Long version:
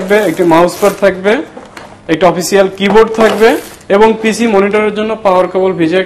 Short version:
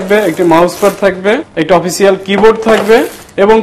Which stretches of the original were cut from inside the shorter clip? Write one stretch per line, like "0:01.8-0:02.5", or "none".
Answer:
0:01.5-0:02.0